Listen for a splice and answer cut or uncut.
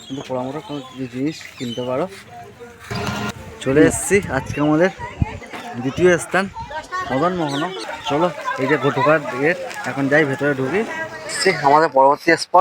cut